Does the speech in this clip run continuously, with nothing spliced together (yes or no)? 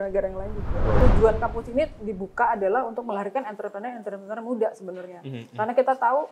no